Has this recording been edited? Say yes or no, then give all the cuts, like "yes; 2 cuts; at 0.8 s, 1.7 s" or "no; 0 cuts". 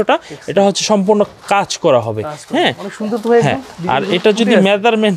no; 0 cuts